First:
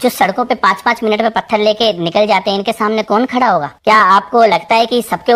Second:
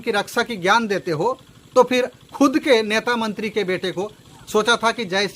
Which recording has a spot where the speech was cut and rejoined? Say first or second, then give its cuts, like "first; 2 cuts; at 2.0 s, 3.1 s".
second; 1 cut; at 4.3 s